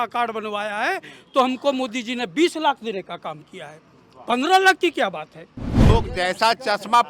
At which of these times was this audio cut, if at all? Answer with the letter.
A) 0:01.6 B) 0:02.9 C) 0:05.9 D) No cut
C